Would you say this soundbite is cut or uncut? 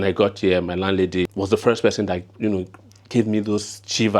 cut